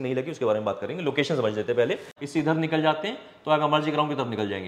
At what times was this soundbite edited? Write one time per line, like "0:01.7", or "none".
0:02.1